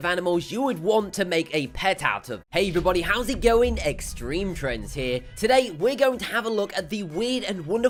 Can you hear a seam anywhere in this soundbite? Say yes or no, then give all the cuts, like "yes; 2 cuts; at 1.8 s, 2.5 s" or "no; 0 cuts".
no; 0 cuts